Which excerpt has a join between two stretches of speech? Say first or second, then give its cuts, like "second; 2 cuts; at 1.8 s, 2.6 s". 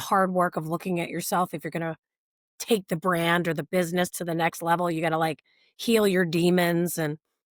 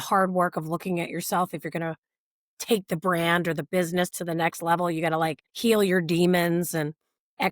second; 1 cut; at 5.5 s